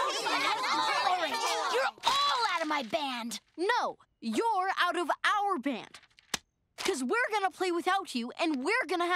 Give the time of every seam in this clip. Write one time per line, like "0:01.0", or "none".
none